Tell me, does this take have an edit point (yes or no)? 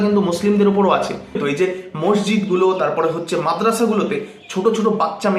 yes